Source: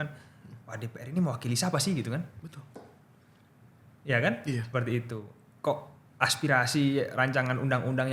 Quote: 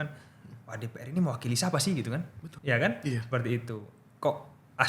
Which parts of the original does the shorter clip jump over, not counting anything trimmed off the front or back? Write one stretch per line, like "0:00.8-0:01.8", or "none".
0:02.4-0:03.9